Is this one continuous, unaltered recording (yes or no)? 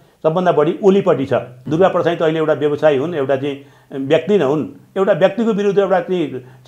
no